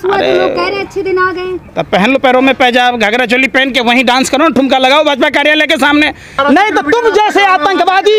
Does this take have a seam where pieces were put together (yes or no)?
yes